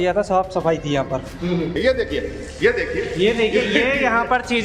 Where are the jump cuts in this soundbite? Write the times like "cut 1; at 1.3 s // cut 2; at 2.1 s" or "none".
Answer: cut 1; at 1.8 s